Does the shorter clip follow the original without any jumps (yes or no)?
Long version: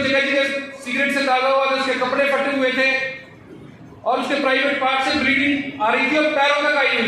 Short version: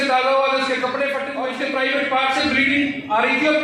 no